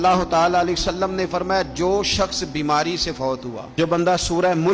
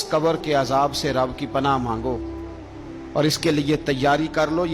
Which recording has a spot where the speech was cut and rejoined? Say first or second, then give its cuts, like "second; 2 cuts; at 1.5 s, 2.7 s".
first; 1 cut; at 3.7 s